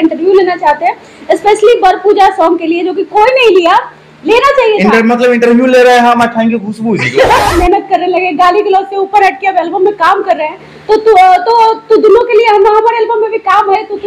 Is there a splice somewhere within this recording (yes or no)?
yes